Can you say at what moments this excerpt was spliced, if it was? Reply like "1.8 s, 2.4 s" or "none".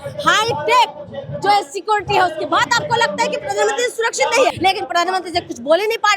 4.6 s

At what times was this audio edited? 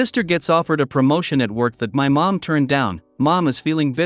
none

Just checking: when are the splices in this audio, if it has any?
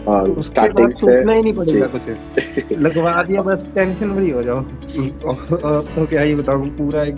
4.8 s

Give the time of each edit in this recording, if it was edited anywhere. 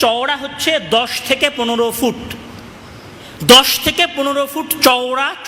none

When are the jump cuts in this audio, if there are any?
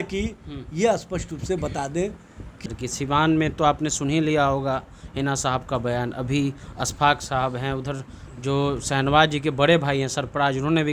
2.6 s

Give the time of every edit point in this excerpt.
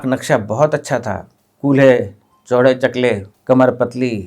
3.3 s

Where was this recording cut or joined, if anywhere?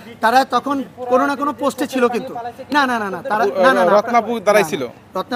none

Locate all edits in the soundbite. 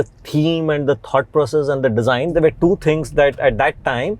2.3 s

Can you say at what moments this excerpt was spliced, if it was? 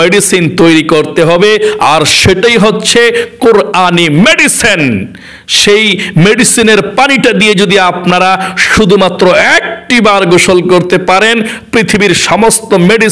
none

